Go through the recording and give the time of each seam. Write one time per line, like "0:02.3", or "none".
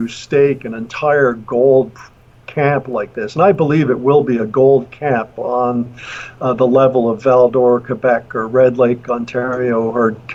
none